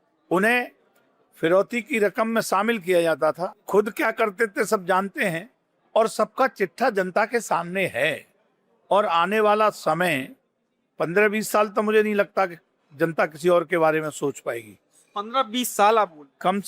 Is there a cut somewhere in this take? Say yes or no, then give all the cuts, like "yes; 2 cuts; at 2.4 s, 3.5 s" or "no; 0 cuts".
no; 0 cuts